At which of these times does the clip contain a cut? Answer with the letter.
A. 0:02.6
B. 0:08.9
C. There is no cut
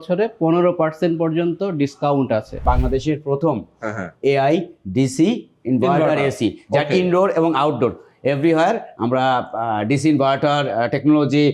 A